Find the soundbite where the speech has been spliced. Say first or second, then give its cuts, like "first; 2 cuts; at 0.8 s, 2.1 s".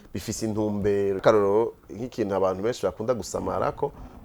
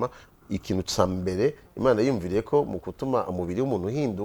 first; 1 cut; at 1.2 s